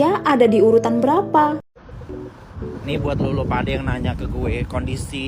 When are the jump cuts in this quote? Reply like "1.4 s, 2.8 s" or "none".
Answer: 1.7 s